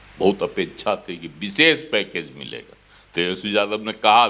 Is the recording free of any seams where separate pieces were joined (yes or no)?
yes